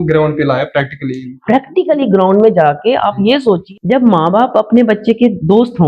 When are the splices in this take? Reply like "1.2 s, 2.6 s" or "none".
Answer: 3.7 s